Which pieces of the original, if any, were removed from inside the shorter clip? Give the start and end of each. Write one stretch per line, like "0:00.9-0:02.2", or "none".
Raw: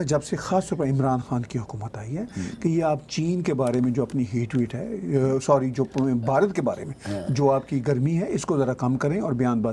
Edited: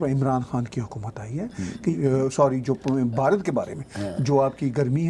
0:02.7-0:05.0